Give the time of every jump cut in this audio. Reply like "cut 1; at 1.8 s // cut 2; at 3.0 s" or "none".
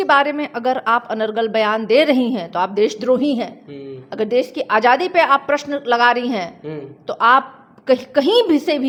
none

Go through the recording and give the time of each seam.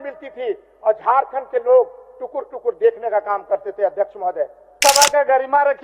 cut 1; at 4.7 s

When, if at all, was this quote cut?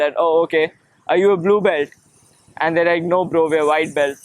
none

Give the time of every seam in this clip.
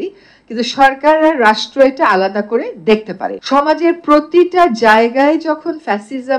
cut 1; at 3.4 s

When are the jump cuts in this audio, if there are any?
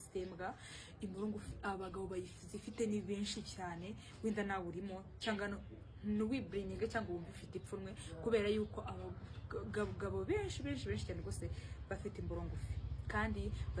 none

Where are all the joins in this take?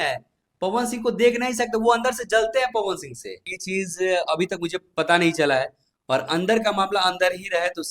cut 1; at 3.5 s

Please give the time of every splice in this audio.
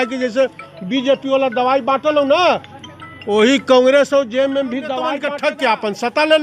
cut 1; at 5.2 s

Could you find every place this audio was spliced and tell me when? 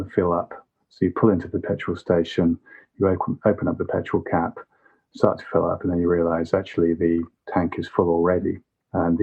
none

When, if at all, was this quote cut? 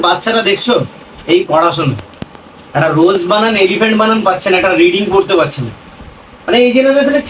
none

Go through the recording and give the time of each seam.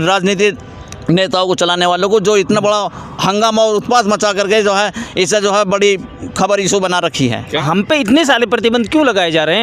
cut 1; at 7.5 s

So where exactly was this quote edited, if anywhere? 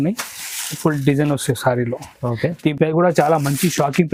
none

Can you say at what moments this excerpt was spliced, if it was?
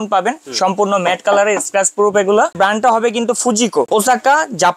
cut 1; at 2.5 s // cut 2; at 3.9 s

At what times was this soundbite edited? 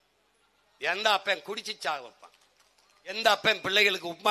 cut 1; at 3.1 s

